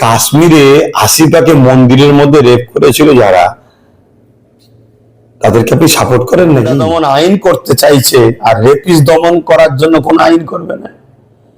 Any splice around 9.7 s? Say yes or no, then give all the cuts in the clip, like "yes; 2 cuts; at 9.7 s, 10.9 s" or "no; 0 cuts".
no; 1 cut; at 6.9 s